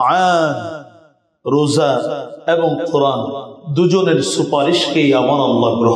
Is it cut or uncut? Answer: uncut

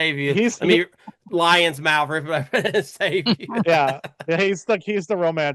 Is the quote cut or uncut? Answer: uncut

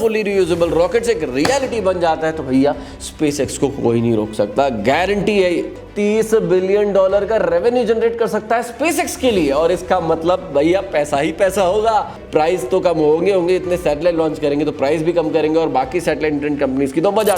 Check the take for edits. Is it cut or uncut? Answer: cut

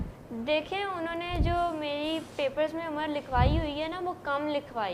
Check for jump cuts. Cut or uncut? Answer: uncut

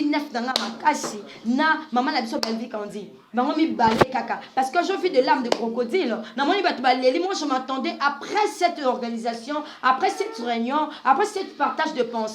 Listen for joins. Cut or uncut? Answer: uncut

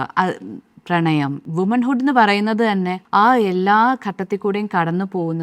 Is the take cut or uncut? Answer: cut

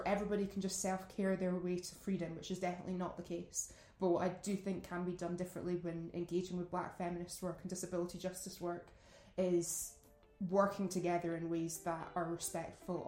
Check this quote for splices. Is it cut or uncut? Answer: uncut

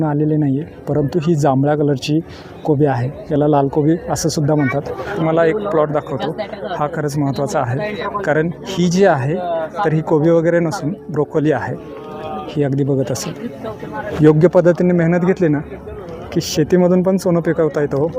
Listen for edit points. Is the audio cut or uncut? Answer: cut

